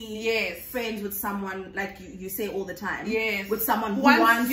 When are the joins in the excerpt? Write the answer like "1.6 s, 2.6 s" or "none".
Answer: none